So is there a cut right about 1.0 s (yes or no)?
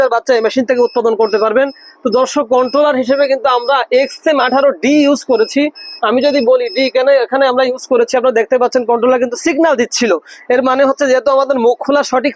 no